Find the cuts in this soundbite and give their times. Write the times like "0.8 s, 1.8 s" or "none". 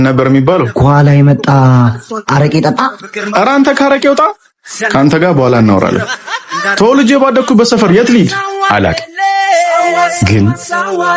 none